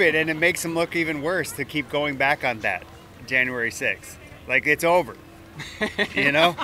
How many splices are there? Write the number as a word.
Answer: zero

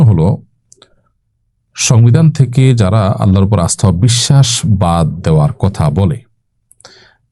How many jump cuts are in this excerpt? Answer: zero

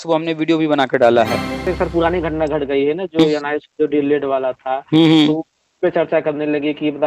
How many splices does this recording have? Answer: one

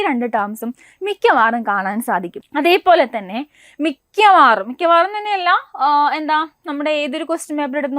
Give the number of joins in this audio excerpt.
one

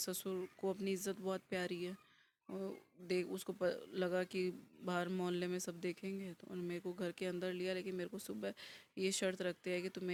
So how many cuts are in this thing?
zero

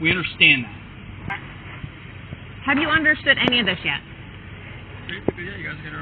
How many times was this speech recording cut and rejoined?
one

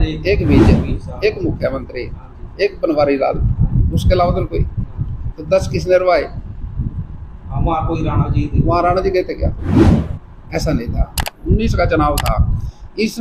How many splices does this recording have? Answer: one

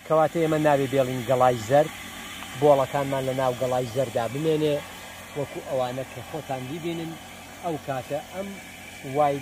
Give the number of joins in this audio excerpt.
zero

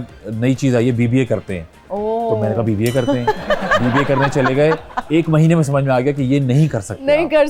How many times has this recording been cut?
zero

